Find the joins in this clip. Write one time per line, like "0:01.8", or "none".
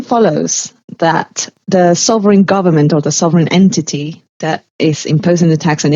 0:01.5